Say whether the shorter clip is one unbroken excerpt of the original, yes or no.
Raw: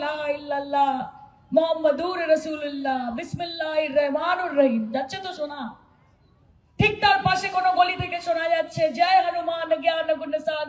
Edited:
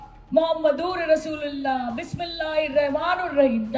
yes